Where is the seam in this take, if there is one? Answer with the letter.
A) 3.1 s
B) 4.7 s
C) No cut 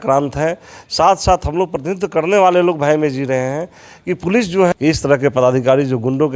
B